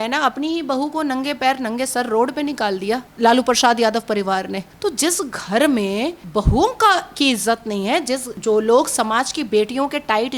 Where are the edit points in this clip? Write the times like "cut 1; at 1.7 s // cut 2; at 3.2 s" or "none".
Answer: cut 1; at 3.1 s // cut 2; at 4.6 s // cut 3; at 6.2 s // cut 4; at 8.3 s